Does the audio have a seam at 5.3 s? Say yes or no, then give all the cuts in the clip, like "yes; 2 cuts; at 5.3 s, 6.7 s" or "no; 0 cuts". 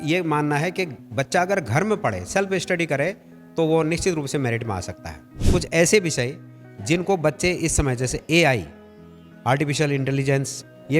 yes; 1 cut; at 5.3 s